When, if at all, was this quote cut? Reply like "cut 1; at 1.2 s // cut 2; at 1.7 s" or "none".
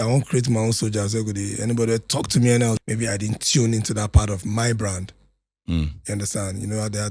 cut 1; at 2.8 s